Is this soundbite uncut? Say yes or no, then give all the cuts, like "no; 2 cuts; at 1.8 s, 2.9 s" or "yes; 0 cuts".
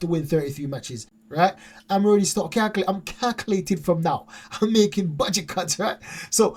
yes; 0 cuts